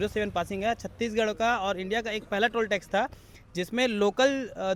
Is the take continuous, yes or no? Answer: yes